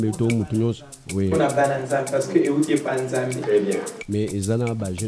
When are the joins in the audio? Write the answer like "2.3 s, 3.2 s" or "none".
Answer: 3.9 s

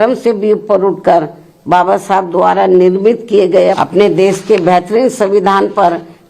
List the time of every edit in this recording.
3.8 s

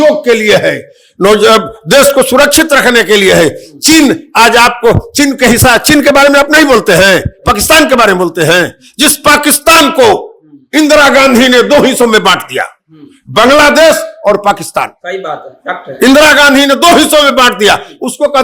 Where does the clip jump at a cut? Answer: none

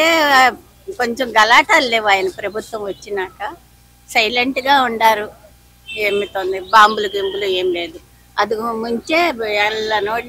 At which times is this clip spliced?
none

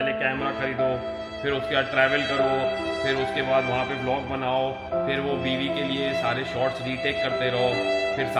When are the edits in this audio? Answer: none

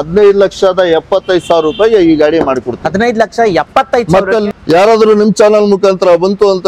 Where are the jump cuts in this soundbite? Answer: 4.4 s

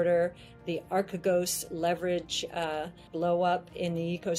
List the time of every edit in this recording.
3.1 s

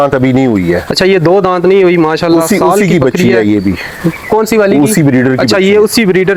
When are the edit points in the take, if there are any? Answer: none

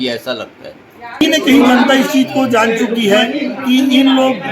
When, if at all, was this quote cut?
1.2 s

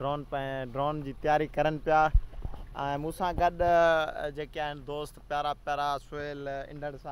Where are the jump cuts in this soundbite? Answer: none

